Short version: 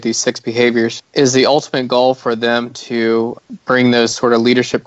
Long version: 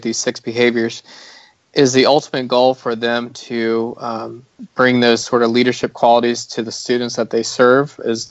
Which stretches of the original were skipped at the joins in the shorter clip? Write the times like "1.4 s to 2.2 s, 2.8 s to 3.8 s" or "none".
1.0 s to 1.6 s, 4.0 s to 4.5 s